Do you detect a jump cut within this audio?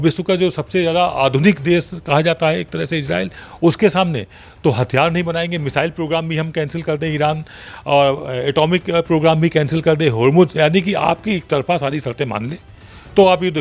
no; 0 cuts

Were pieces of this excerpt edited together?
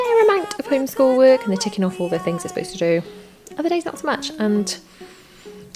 no; 0 cuts

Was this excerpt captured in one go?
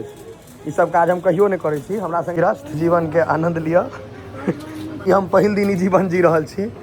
no; 2 cuts; at 2.3 s, 5.1 s

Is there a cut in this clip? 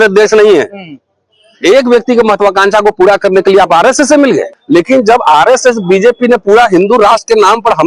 yes; 1 cut; at 4.5 s

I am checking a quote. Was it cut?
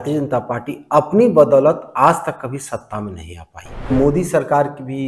yes; 1 cut; at 3.9 s

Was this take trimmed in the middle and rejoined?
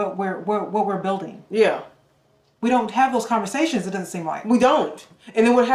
no; 0 cuts

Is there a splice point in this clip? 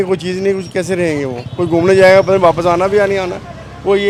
no; 0 cuts

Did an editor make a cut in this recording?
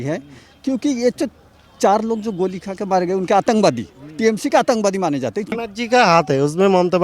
yes; 1 cut; at 5.5 s

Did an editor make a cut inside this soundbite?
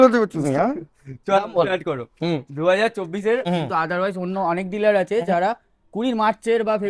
yes; 1 cut; at 3.5 s

